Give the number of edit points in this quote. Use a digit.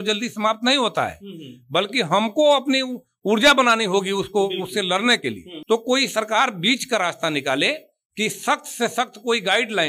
1